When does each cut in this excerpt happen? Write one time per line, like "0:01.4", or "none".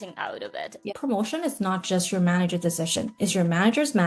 0:00.9